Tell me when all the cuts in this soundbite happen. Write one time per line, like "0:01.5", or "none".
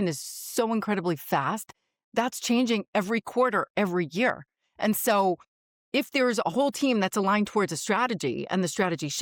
none